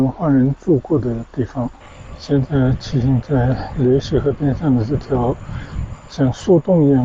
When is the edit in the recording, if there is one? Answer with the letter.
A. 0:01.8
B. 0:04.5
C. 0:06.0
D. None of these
A